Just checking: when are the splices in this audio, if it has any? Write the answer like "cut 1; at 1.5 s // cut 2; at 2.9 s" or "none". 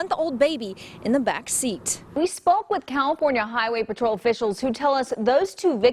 cut 1; at 2.1 s